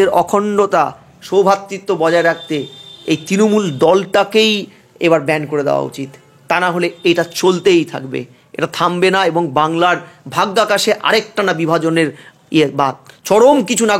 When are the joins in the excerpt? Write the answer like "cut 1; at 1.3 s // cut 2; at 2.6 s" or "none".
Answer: none